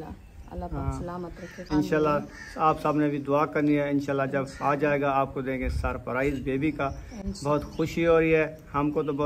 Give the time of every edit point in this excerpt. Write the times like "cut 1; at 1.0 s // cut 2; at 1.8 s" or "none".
cut 1; at 1.6 s